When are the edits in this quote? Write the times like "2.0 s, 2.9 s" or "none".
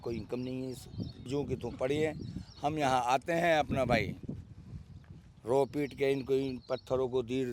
1.3 s